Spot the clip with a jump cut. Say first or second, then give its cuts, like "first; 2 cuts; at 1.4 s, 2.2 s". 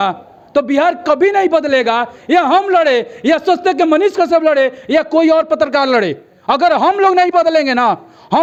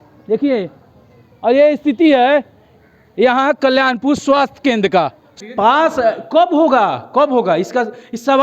second; 1 cut; at 5.3 s